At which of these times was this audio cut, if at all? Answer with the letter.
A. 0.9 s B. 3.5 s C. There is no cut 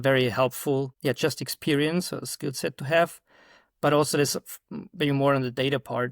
A